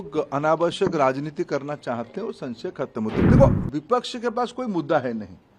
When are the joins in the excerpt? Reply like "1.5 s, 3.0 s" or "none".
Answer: 3.3 s